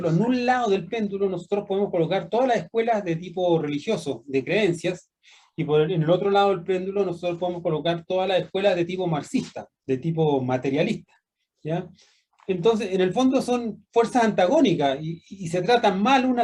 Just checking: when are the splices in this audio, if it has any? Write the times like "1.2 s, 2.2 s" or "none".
none